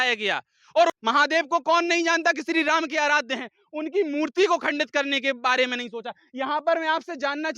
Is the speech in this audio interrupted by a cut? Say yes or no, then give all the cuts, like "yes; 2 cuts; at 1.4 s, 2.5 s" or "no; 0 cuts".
yes; 2 cuts; at 0.9 s, 2.2 s